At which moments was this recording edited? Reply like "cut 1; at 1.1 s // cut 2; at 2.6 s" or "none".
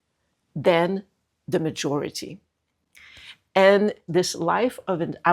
cut 1; at 4.0 s